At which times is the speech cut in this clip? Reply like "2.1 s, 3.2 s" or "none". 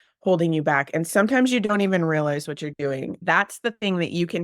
1.1 s, 3.2 s